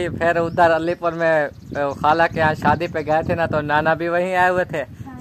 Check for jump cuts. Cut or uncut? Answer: uncut